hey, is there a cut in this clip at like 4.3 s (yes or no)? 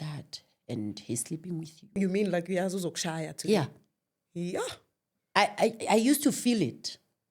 no